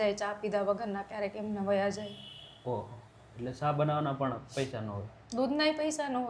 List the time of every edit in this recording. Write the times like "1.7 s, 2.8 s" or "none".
none